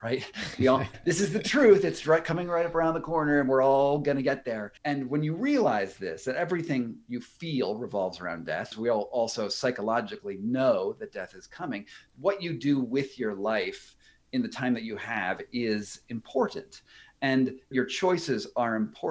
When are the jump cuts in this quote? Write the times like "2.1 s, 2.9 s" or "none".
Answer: 0.9 s, 4.7 s, 8.7 s, 17.7 s

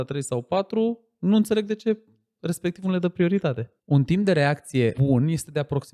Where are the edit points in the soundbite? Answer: 3.7 s, 5.0 s

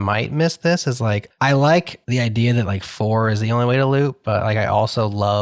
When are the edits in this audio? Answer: 1.3 s, 2.0 s

